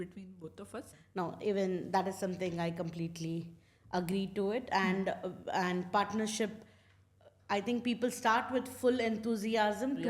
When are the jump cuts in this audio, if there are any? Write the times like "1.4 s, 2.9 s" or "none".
0.9 s